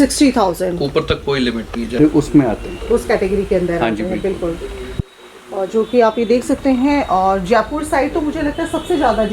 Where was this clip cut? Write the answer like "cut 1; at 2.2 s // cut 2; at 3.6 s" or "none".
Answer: cut 1; at 2.0 s